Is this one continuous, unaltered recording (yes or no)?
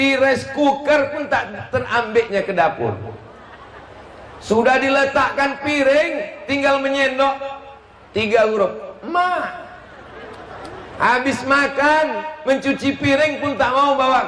yes